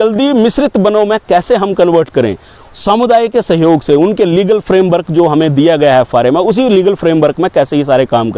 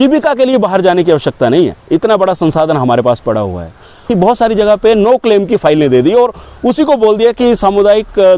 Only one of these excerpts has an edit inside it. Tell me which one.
second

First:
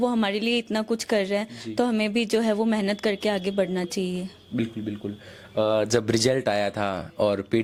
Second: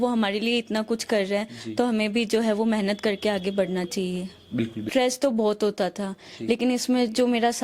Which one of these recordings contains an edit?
second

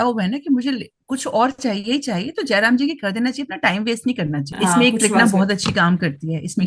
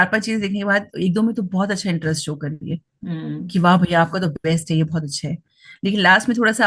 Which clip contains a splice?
first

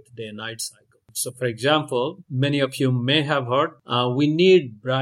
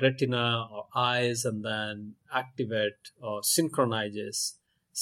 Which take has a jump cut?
first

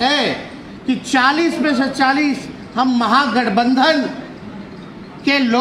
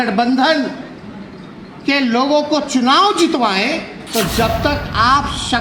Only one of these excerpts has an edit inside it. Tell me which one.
second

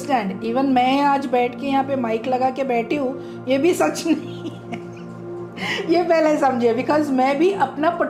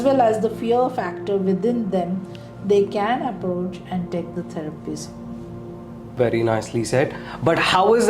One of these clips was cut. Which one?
second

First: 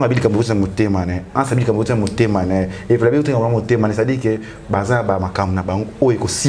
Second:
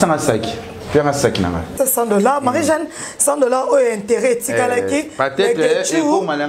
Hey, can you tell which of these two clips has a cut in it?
second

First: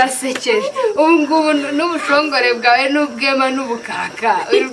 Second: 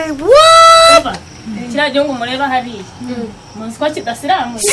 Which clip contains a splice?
second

